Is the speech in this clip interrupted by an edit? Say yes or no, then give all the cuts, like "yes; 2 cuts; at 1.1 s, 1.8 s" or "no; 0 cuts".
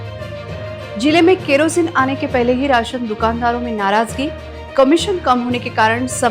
yes; 1 cut; at 1.0 s